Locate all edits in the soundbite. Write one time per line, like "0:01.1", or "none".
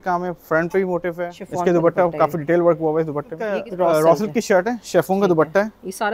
0:01.3
0:03.5